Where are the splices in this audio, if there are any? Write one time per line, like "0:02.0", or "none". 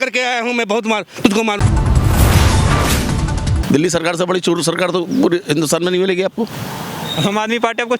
0:01.6
0:03.5